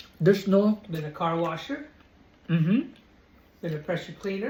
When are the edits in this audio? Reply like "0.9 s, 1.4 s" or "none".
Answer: none